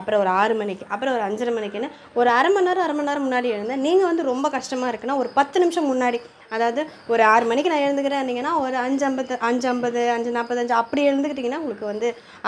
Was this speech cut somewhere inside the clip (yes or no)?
no